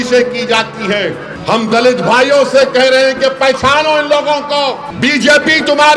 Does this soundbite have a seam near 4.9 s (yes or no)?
yes